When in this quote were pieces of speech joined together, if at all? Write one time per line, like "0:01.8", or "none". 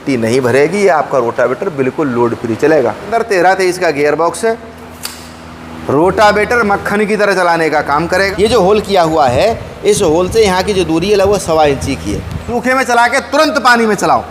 0:03.1
0:08.3
0:12.5